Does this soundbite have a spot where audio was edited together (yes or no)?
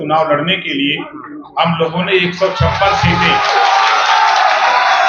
no